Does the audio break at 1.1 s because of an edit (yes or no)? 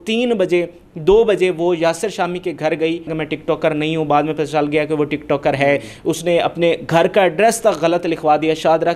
no